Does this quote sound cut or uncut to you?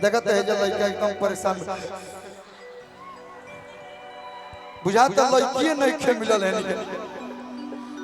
uncut